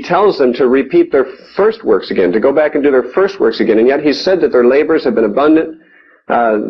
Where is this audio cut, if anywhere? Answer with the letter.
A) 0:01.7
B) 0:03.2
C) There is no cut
A